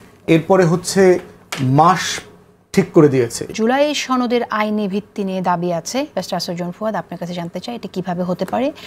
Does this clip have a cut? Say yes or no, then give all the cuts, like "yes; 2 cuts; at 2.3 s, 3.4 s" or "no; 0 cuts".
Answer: yes; 1 cut; at 3.5 s